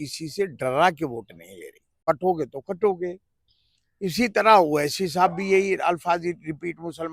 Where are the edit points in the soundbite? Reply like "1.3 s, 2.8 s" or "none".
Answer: 2.0 s